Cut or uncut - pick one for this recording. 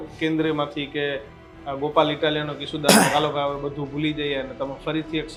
uncut